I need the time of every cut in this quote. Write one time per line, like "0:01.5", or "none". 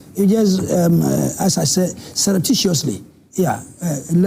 none